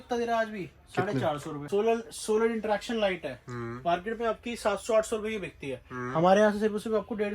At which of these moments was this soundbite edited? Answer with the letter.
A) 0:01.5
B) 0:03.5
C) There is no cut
A